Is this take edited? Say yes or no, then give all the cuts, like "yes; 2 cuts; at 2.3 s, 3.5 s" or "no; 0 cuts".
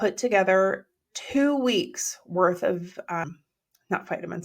yes; 1 cut; at 3.2 s